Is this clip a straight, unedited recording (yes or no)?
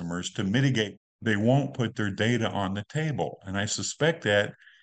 no